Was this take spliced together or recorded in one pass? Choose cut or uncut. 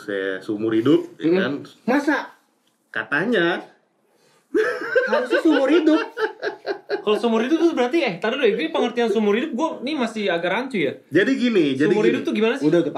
uncut